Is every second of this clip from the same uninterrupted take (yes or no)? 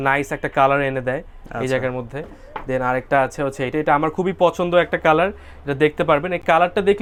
yes